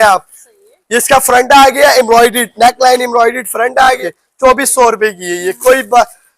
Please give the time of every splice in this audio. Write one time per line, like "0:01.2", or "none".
0:04.0